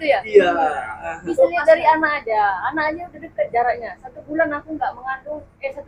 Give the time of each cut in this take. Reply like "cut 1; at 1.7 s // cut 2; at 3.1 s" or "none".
none

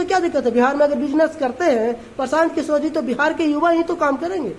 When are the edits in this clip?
none

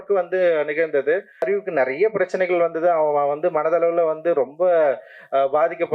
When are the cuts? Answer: cut 1; at 1.5 s

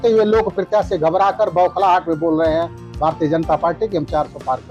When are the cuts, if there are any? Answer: none

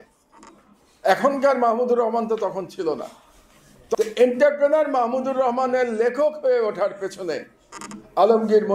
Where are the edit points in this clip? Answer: cut 1; at 3.9 s

